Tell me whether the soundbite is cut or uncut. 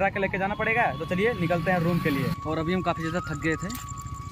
cut